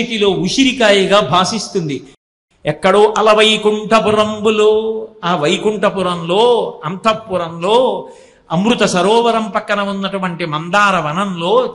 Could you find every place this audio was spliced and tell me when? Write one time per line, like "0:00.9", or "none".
0:02.1